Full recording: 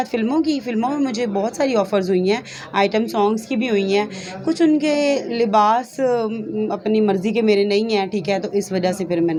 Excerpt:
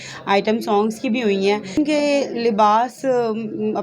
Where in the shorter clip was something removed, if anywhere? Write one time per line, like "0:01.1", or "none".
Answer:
0:01.8